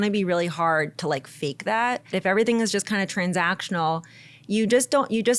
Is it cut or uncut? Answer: cut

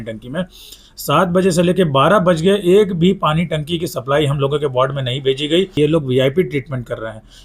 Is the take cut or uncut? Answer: cut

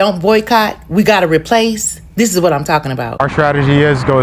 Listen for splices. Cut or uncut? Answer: uncut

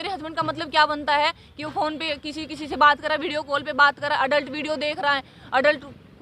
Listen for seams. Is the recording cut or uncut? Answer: uncut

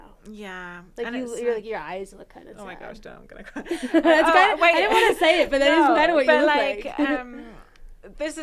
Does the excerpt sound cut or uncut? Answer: uncut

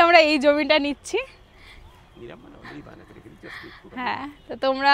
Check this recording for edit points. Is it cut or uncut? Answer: uncut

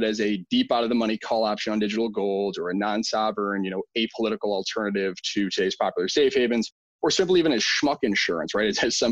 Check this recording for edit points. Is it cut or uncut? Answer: uncut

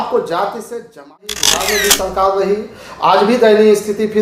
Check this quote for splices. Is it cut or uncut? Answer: cut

